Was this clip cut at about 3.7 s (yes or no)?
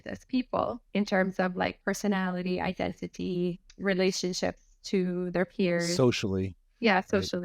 yes